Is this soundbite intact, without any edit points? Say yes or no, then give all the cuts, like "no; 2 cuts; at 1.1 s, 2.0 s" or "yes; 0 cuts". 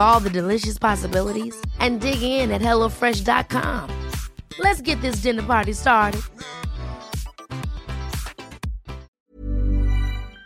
no; 1 cut; at 9.2 s